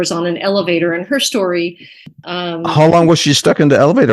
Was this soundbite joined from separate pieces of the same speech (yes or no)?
yes